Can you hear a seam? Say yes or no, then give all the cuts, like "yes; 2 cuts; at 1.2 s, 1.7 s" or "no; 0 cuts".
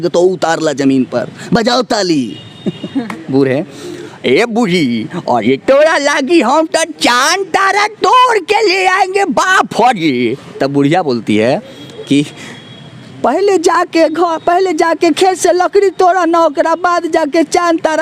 yes; 1 cut; at 3.2 s